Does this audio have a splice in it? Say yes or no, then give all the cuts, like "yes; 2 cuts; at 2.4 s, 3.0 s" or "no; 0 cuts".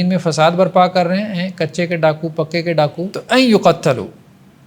yes; 1 cut; at 3.1 s